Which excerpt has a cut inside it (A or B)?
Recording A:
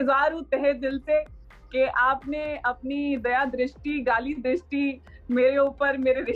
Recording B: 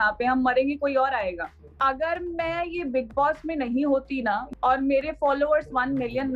B